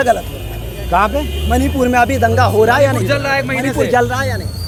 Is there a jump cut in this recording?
no; 0 cuts

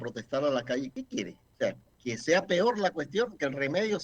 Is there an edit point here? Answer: yes; 1 cut; at 1.2 s

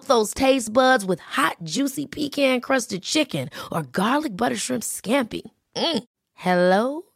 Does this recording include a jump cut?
no; 0 cuts

